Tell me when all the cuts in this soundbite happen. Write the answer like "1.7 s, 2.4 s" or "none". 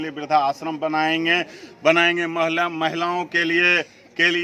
none